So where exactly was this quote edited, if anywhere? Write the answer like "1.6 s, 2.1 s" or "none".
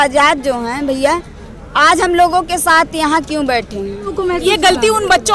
4.1 s